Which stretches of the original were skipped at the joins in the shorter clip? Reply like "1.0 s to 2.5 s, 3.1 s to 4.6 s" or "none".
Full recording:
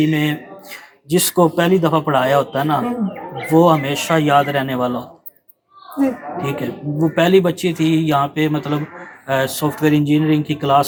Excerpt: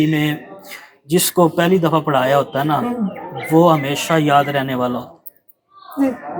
none